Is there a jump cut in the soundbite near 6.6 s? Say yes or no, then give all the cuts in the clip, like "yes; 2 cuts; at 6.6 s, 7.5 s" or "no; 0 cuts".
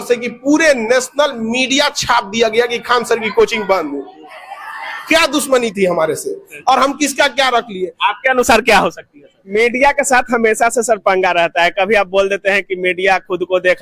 no; 1 cut; at 9.4 s